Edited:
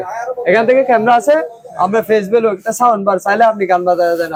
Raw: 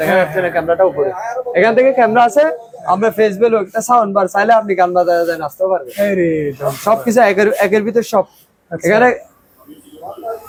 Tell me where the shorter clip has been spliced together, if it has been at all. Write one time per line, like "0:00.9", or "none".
none